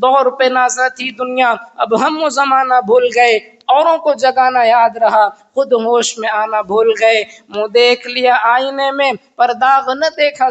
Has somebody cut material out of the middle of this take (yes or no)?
no